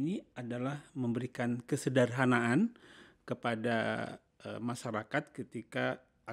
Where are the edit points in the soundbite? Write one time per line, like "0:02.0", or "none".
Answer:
none